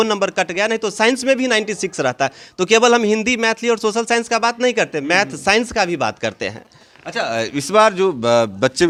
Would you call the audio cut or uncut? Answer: uncut